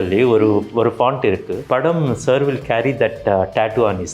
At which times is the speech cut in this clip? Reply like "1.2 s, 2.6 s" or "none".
1.6 s